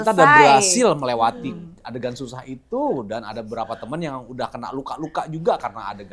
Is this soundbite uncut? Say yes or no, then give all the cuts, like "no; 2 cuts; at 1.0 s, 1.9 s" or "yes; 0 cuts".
yes; 0 cuts